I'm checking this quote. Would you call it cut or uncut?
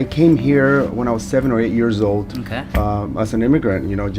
uncut